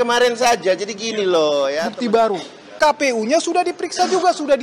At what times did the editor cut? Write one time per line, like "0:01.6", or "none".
0:02.4